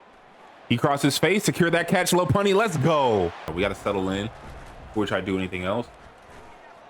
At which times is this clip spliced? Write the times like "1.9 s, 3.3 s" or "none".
3.5 s